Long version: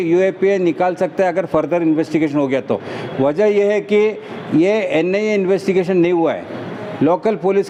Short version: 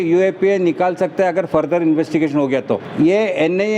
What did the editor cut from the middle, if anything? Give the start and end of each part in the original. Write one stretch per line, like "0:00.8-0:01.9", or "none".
0:02.8-0:04.3